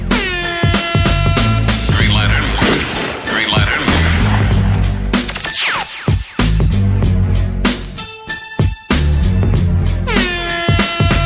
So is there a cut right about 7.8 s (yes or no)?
yes